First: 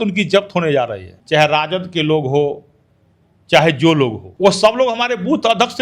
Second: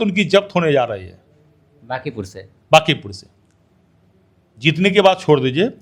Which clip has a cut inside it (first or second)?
first